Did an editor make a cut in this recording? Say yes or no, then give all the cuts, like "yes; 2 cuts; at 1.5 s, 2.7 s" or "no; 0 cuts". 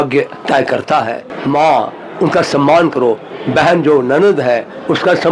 yes; 1 cut; at 1.3 s